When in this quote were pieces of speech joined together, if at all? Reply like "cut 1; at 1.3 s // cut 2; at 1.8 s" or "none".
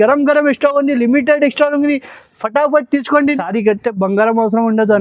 cut 1; at 3.4 s

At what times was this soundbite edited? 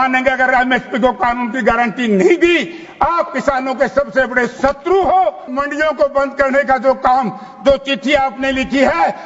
cut 1; at 5.5 s

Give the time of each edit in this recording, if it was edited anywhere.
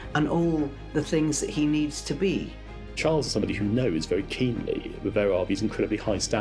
cut 1; at 3.0 s

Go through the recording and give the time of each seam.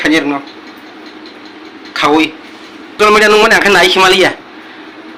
cut 1; at 3.0 s

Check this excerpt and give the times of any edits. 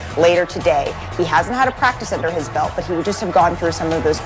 none

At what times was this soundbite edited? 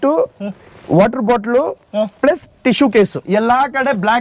cut 1; at 3.2 s

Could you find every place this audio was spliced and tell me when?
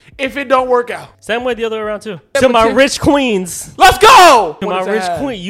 cut 1; at 1.1 s // cut 2; at 2.3 s // cut 3; at 4.6 s

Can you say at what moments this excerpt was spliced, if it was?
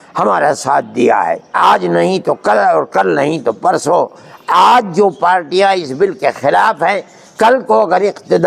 cut 1; at 1.6 s

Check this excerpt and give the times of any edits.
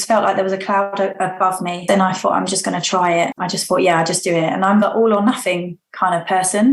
cut 1; at 1.8 s // cut 2; at 3.4 s

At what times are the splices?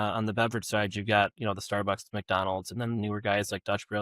none

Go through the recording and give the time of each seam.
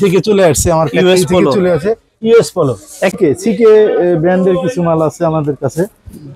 cut 1; at 3.1 s

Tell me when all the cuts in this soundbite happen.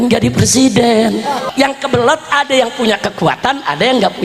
cut 1; at 1.4 s

